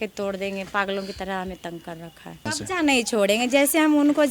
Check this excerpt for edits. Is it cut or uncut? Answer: cut